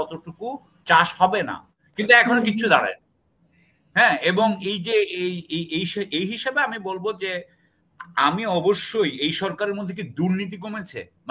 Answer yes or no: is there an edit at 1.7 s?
yes